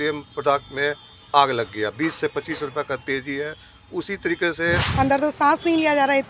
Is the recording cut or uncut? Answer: cut